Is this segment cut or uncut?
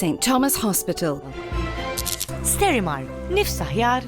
cut